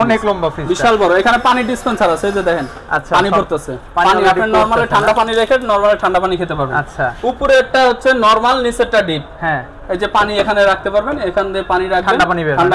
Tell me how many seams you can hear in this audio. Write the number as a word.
zero